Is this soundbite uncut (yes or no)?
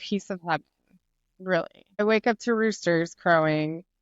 no